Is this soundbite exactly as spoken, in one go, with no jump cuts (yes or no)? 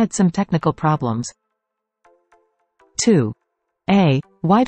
no